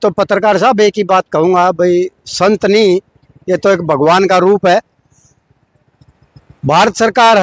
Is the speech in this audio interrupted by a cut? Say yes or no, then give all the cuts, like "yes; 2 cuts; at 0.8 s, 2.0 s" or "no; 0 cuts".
no; 0 cuts